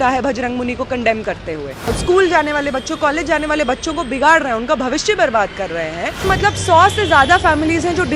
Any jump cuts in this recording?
yes; 2 cuts; at 2.0 s, 6.2 s

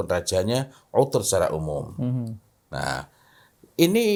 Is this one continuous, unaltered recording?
yes; 0 cuts

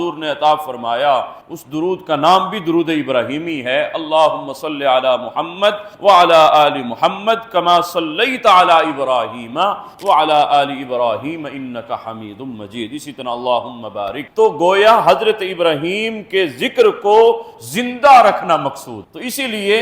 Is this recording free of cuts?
yes; 0 cuts

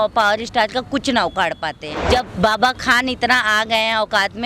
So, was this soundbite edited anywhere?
yes; 1 cut; at 1.9 s

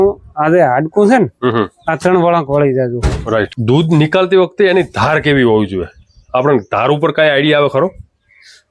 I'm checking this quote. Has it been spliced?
yes; 1 cut; at 3.5 s

